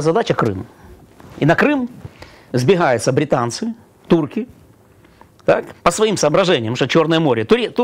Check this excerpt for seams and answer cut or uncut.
uncut